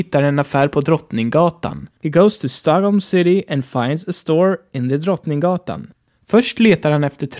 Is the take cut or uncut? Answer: uncut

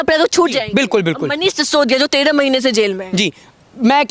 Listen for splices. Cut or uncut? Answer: uncut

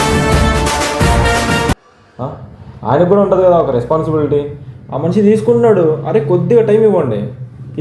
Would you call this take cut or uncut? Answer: uncut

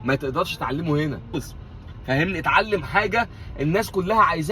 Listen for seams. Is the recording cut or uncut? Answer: cut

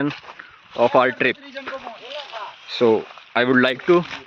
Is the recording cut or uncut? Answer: uncut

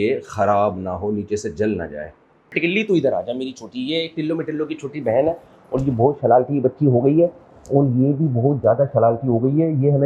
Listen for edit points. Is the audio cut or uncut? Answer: cut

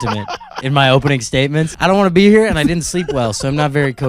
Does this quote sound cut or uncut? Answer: cut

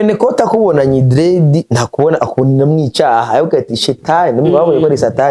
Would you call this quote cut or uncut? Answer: uncut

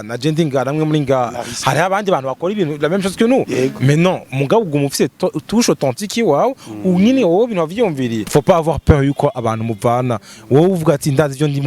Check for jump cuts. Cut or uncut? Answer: cut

